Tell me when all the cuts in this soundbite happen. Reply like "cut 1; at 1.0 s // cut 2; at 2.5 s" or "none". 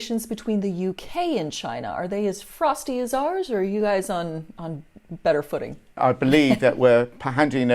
cut 1; at 6.0 s